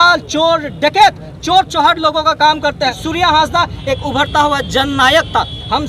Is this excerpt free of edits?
no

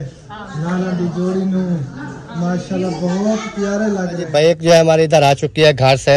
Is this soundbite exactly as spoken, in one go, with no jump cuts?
no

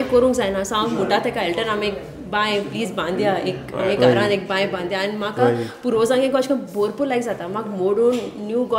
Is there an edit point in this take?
no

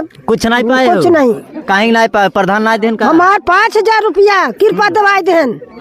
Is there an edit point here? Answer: no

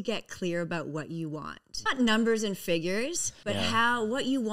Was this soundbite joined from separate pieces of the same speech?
yes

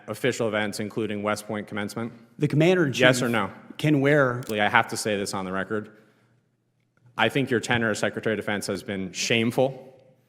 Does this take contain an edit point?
yes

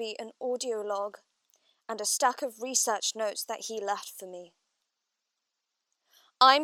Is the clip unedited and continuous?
yes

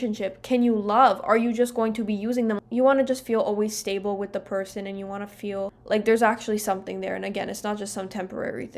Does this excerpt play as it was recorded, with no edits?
no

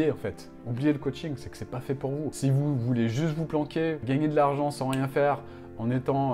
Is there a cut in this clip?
no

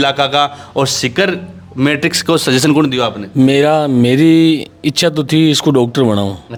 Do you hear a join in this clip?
no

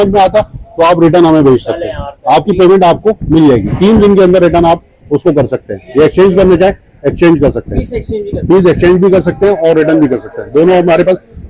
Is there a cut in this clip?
no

